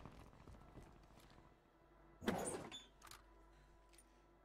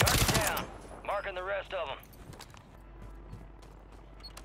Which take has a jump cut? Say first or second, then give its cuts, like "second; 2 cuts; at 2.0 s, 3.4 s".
second; 1 cut; at 2.7 s